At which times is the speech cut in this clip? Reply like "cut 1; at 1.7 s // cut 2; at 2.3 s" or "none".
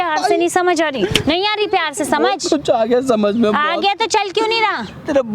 none